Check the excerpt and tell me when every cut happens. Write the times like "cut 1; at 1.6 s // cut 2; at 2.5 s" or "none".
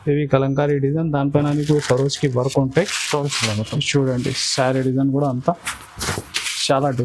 none